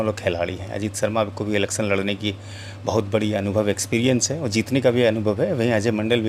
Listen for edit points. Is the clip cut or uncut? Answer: uncut